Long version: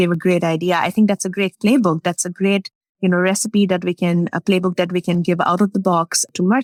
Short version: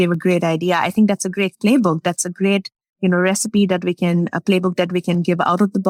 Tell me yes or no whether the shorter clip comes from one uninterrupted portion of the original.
yes